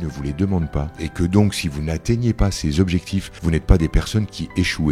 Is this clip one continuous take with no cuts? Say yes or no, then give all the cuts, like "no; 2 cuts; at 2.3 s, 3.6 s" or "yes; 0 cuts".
no; 2 cuts; at 1.0 s, 3.3 s